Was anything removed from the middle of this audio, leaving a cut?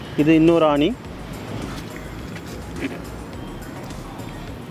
no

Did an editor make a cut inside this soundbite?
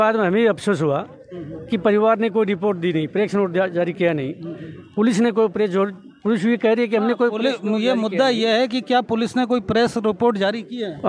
no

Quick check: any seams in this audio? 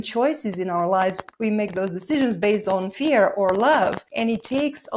yes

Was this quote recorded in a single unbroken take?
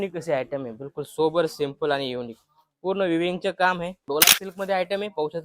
no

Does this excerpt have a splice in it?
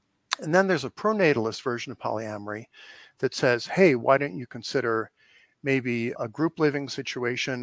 no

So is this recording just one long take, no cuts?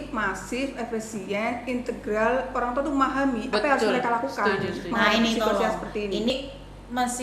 no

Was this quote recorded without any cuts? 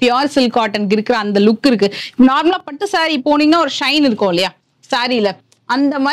yes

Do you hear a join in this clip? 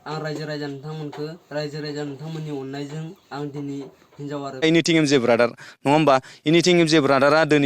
yes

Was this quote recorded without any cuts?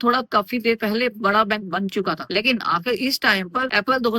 yes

